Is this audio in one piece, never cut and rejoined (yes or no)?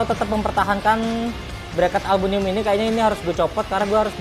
yes